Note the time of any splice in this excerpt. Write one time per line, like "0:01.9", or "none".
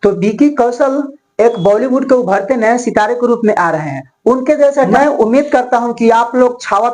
0:04.9